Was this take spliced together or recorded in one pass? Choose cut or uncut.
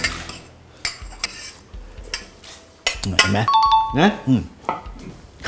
uncut